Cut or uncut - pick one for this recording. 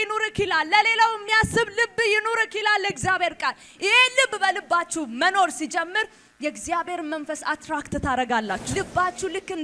cut